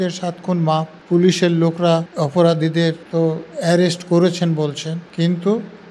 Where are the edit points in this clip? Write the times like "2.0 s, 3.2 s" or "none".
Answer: 0.9 s, 2.1 s, 3.0 s, 5.0 s